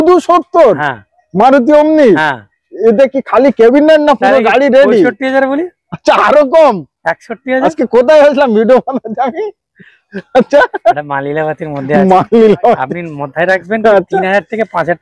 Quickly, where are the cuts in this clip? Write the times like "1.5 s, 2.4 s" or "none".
none